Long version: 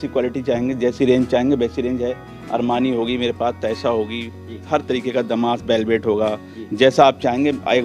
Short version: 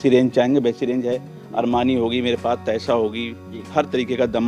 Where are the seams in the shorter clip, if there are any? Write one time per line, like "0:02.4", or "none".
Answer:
none

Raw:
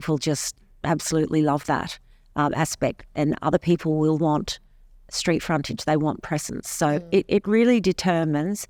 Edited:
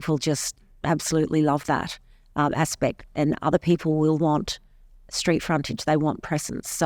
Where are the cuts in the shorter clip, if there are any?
none

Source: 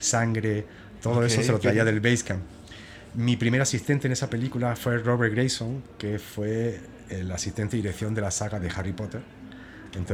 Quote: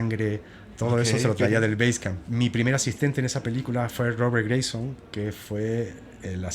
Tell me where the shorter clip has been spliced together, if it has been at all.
0:02.1

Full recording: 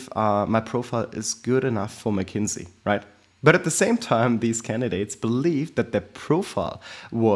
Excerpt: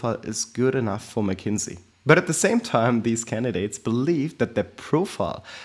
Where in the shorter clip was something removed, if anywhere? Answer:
0:01.8

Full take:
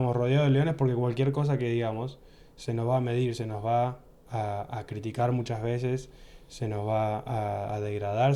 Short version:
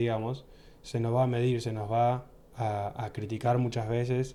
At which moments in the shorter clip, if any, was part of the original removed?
none

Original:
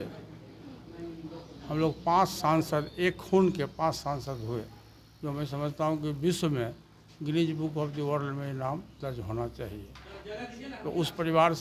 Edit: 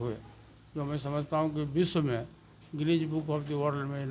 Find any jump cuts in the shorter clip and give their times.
none

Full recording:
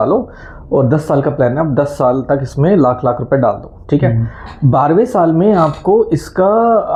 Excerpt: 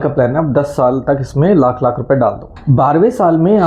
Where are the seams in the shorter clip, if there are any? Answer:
0:02.5

